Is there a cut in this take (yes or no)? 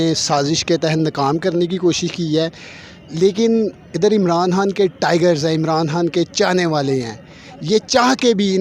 no